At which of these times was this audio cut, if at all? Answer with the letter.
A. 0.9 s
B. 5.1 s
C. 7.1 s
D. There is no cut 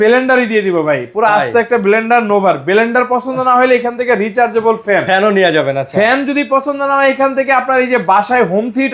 D